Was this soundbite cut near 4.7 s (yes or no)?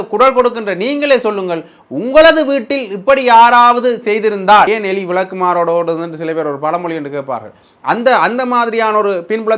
yes